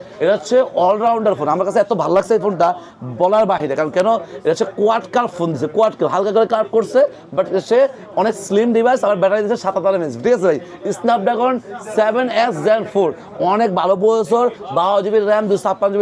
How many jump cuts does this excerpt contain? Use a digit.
0